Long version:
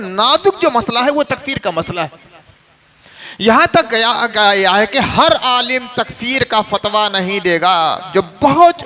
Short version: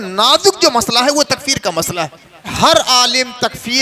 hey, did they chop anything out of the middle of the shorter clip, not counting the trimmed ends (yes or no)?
yes